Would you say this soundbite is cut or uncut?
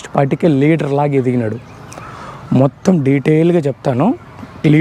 uncut